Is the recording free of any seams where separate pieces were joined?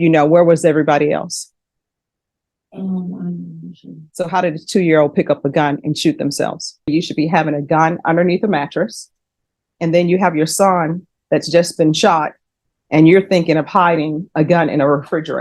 no; 1 cut; at 6.9 s

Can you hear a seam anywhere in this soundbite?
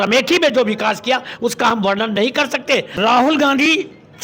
yes; 1 cut; at 3.0 s

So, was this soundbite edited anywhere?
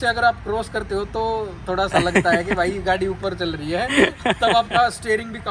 no; 0 cuts

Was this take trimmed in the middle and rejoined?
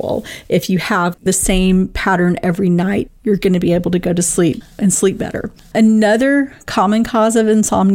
yes; 2 cuts; at 1.2 s, 4.7 s

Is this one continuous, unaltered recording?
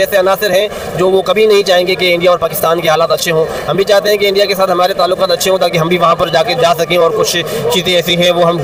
yes; 0 cuts

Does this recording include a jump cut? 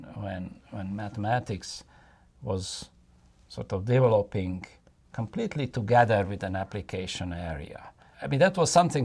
yes; 1 cut; at 8.1 s

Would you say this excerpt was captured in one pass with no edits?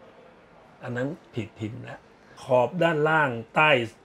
no; 1 cut; at 2.4 s

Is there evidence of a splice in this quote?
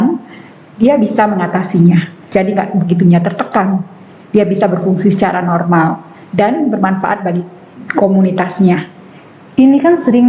no; 0 cuts

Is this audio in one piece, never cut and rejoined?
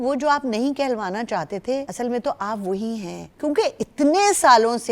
no; 2 cuts; at 1.9 s, 3.2 s

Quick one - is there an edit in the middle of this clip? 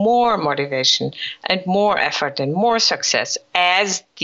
no; 0 cuts

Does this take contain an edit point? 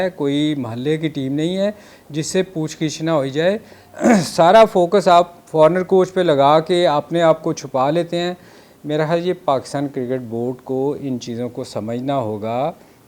no; 0 cuts

